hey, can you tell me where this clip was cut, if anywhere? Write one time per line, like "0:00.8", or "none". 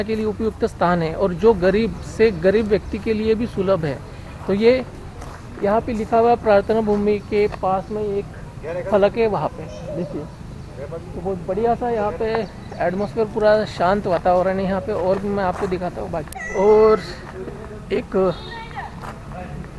none